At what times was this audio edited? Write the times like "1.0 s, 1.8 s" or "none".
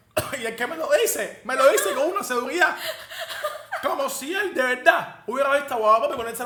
none